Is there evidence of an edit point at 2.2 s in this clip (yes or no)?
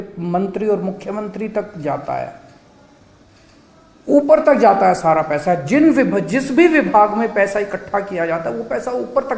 no